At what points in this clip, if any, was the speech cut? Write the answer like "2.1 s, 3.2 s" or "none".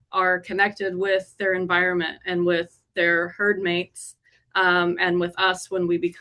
none